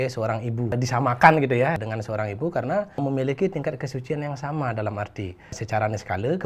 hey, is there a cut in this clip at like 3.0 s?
yes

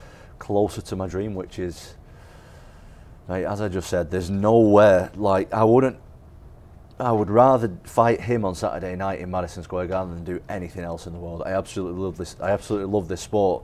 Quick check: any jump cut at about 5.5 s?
no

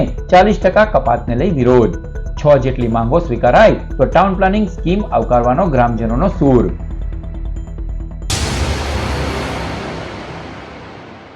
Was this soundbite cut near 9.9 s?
no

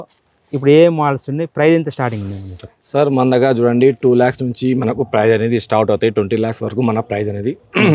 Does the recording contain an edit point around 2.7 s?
no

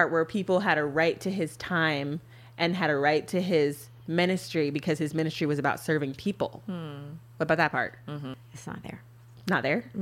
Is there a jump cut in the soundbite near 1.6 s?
no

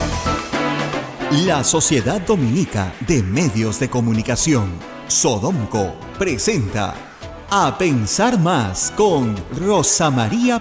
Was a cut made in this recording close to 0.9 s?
yes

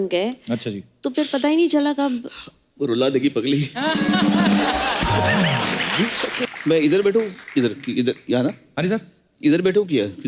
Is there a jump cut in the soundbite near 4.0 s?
no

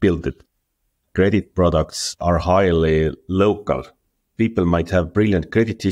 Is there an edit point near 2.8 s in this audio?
no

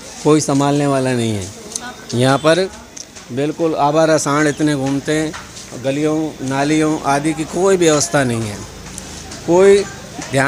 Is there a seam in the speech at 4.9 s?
no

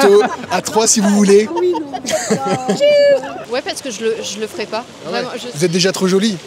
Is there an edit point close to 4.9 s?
no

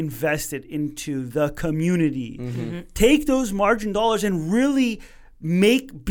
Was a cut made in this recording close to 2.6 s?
no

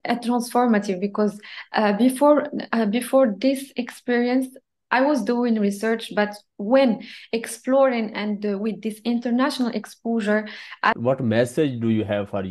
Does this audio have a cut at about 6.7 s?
no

